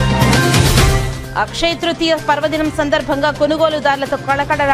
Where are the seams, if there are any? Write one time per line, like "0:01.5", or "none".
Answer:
none